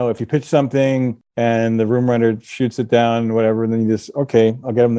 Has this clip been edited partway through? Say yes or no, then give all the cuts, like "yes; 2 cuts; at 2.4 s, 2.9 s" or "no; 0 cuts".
no; 0 cuts